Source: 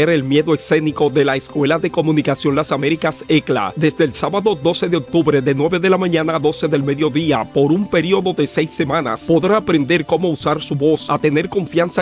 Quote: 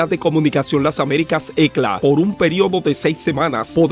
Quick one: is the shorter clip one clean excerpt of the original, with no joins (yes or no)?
no